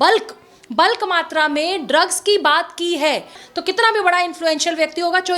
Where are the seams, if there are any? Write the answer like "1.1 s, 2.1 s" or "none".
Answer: 3.4 s